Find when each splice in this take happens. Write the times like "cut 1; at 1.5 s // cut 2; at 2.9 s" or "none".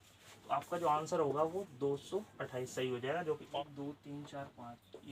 cut 1; at 3.6 s